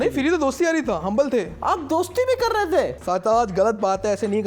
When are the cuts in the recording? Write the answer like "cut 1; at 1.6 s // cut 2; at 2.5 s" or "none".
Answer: cut 1; at 3.0 s